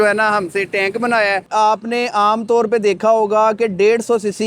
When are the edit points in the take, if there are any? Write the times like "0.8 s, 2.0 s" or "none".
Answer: 1.5 s